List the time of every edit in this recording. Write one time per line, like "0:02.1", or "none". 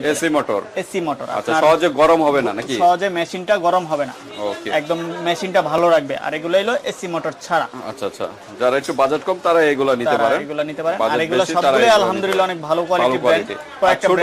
none